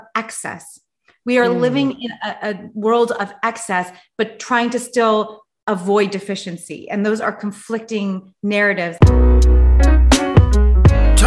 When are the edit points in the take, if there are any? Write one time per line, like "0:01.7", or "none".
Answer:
0:08.9

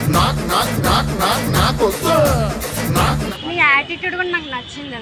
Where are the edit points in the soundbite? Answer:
0:03.3

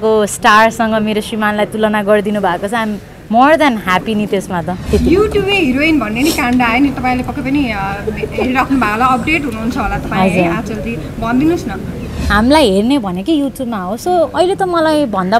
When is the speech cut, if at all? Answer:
0:04.8
0:12.2

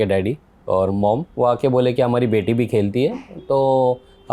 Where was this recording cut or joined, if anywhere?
0:00.9

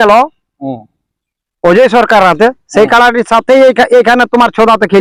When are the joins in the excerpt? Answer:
none

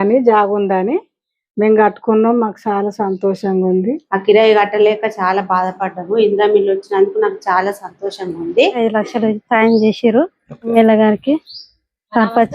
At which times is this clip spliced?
0:04.0
0:08.8
0:10.7

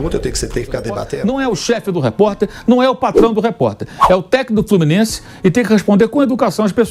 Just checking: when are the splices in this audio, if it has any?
0:01.1

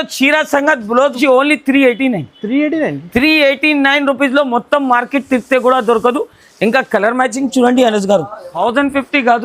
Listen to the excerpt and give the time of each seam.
0:01.2
0:08.5

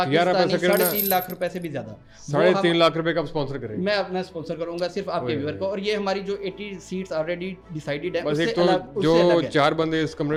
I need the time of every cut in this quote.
none

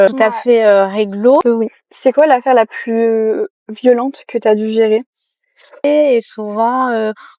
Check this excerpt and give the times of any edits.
0:01.4
0:05.8

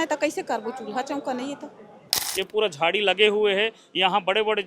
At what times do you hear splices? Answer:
0:02.2

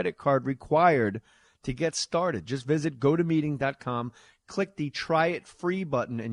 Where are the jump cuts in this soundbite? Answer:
0:04.4

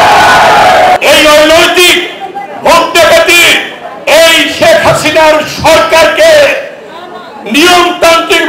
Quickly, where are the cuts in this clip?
0:01.0

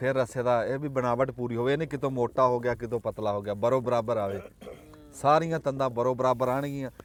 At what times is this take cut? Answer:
none

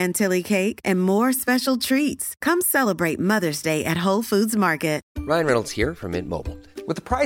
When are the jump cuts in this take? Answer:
0:05.1

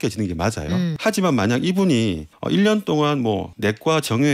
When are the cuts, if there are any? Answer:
0:01.0
0:02.3
0:03.5

